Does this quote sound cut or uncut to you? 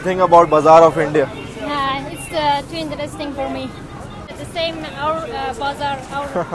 cut